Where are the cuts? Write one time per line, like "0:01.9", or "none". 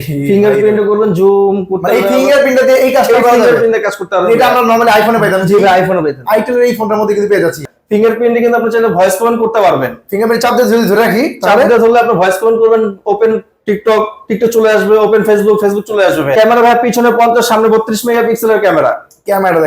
0:07.7
0:16.3